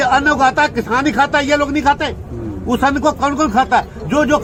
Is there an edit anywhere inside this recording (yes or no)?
no